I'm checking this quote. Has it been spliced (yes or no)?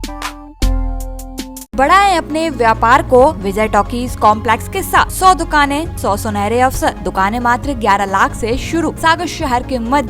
yes